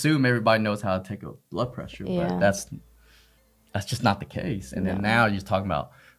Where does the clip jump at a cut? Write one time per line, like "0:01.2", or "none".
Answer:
none